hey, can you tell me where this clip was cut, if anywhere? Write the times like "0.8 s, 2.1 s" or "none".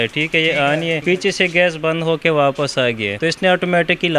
1.0 s, 3.1 s